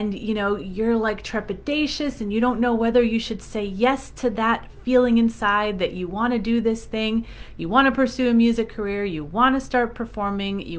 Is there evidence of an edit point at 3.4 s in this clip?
no; 0 cuts

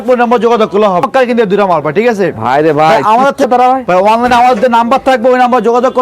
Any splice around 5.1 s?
no; 2 cuts; at 1.1 s, 3.5 s

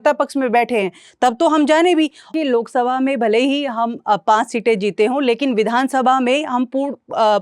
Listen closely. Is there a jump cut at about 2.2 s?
yes; 1 cut; at 2.2 s

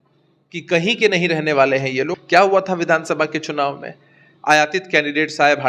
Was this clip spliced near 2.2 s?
yes; 1 cut; at 2.2 s

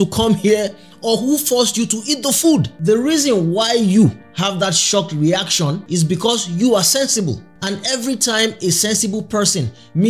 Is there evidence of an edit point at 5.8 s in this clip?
yes; 2 cuts; at 2.7 s, 5.8 s

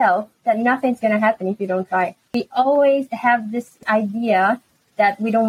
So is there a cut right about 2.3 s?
yes; 2 cuts; at 2.3 s, 3.8 s

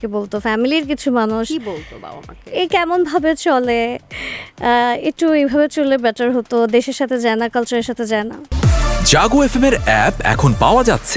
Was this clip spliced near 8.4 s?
yes; 1 cut; at 8.4 s

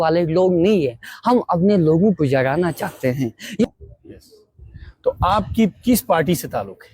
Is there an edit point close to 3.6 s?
yes; 1 cut; at 3.6 s

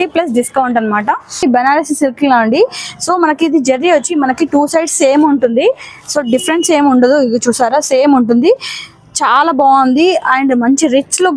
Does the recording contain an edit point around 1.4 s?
yes; 1 cut; at 1.4 s

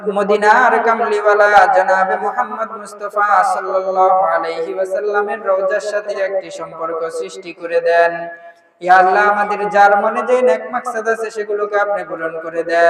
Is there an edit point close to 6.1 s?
yes; 1 cut; at 6.1 s

